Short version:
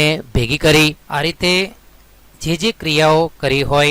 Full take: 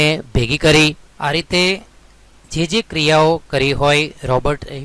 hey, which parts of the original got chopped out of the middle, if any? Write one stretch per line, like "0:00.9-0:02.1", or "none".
0:01.0-0:01.1